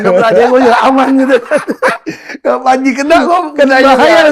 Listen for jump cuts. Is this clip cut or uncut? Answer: uncut